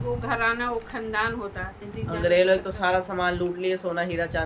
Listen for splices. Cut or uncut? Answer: cut